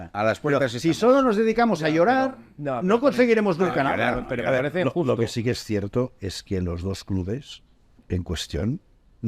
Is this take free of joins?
yes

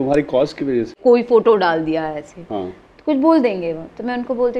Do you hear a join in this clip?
yes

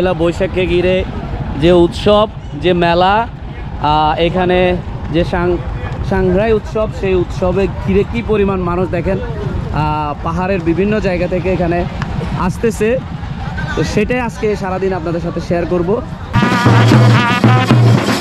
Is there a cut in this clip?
yes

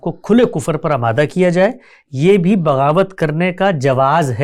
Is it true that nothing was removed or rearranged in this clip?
yes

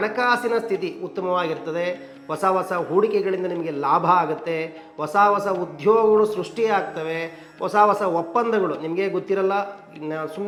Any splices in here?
no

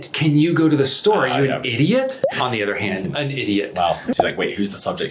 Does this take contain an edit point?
yes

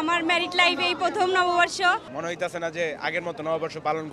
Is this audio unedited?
no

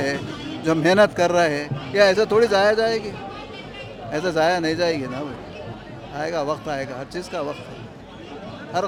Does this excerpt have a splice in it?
no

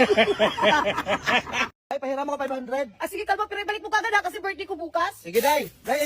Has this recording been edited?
yes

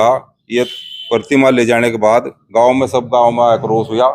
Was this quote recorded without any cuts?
yes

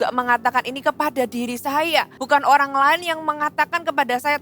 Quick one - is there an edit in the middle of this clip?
yes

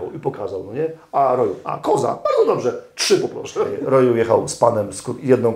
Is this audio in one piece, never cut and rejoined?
no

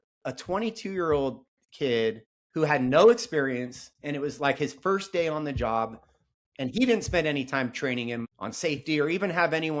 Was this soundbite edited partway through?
no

